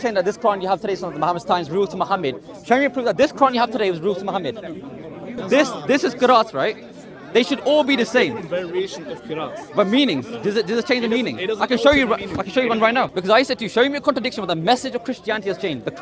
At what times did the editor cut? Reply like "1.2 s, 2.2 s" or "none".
5.4 s, 13.1 s